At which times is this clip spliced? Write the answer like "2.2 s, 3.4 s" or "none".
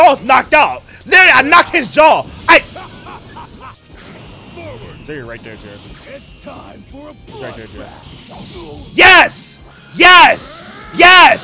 3.8 s

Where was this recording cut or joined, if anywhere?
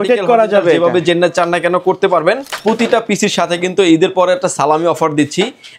2.5 s

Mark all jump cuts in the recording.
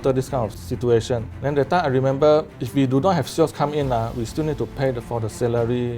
1.3 s, 2.6 s

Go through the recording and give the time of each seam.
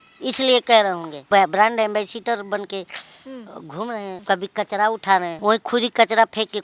1.1 s, 4.2 s, 5.3 s

